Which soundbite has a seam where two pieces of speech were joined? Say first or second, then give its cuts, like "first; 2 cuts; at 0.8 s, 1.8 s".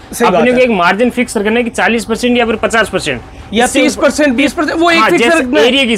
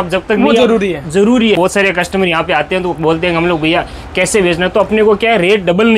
second; 1 cut; at 1.6 s